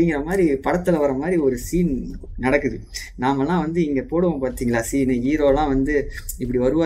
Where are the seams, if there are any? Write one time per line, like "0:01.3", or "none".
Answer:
none